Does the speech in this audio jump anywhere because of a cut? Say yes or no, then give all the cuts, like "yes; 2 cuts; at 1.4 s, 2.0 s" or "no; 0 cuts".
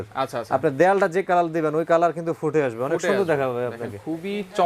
no; 0 cuts